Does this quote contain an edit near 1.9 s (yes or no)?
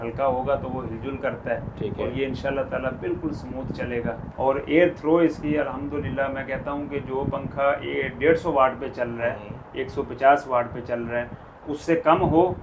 no